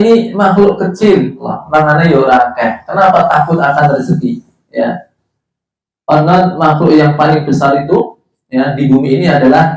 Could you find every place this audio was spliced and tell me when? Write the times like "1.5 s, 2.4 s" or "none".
1.5 s